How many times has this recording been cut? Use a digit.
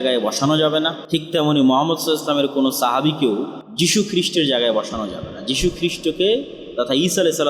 2